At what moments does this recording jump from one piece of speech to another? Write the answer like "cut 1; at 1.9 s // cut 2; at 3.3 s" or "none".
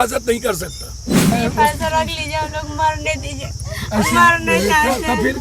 cut 1; at 1.3 s